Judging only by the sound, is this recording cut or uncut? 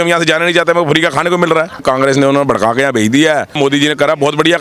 cut